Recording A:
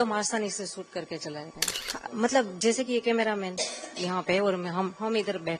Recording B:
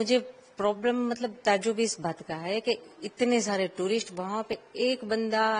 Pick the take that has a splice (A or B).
A